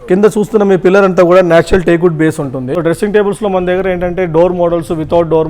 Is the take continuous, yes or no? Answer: no